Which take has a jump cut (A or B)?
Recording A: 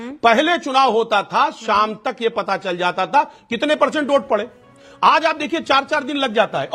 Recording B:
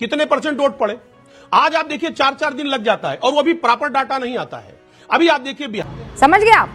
B